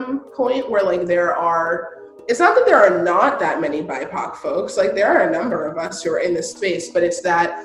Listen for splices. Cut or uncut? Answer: uncut